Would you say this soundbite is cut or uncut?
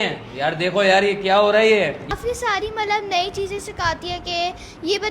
cut